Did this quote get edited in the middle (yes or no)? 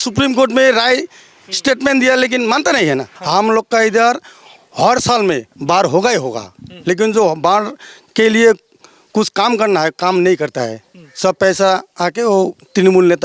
yes